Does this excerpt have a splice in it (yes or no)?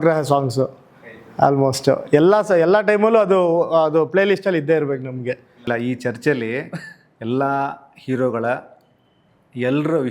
no